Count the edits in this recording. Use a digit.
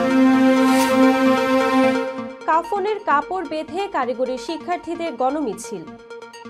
1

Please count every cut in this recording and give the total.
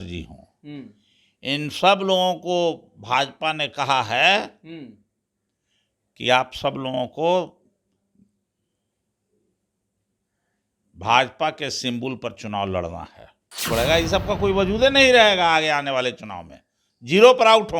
1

